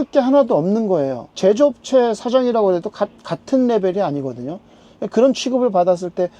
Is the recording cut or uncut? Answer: cut